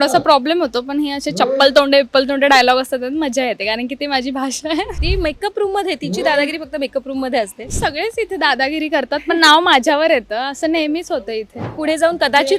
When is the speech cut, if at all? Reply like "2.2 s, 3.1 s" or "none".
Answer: 5.0 s, 7.7 s, 11.6 s